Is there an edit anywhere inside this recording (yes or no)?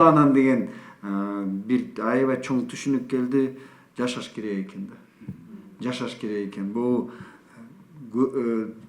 no